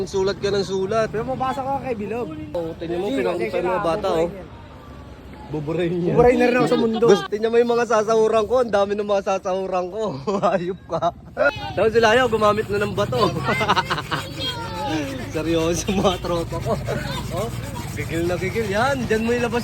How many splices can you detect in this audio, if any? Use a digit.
0